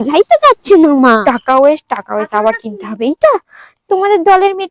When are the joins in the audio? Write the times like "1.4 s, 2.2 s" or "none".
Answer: 1.2 s